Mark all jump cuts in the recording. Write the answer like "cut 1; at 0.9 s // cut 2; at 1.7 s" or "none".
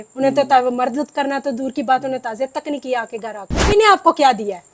cut 1; at 3.7 s